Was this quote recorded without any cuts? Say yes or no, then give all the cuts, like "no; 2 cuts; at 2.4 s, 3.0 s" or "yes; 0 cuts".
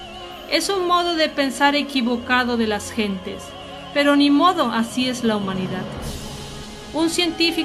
no; 1 cut; at 1.0 s